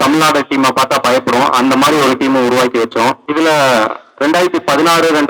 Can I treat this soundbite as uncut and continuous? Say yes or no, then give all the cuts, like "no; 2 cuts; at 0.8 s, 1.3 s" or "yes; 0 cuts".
no; 1 cut; at 3.2 s